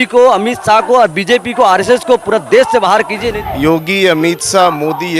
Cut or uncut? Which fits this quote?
cut